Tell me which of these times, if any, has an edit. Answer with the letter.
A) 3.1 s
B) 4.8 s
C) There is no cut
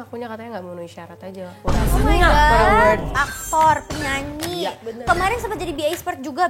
A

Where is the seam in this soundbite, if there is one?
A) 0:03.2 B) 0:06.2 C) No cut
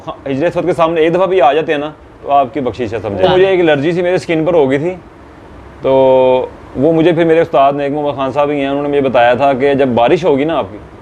A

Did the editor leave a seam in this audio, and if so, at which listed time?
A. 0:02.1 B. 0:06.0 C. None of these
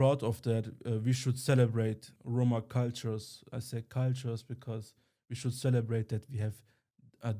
A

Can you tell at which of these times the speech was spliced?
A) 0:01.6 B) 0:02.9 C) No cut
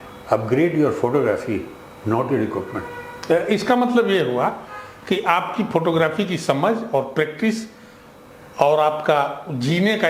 C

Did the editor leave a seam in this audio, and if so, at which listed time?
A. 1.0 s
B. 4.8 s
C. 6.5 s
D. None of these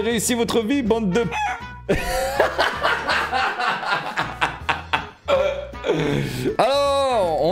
C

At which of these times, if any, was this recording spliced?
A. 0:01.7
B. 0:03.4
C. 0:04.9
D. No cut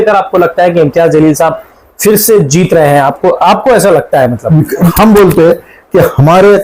C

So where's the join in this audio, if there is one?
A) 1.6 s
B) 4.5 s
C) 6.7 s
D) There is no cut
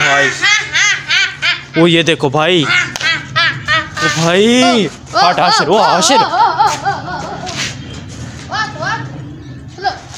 D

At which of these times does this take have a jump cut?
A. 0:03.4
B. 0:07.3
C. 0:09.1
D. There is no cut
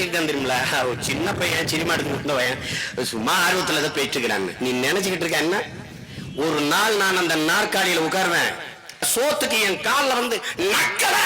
C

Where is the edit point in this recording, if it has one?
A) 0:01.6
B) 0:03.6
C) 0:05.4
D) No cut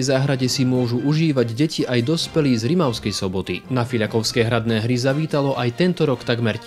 B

